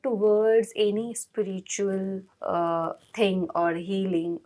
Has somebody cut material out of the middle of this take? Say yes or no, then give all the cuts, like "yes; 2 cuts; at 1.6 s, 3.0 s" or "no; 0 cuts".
yes; 1 cut; at 2.3 s